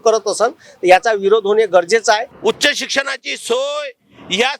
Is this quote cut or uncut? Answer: cut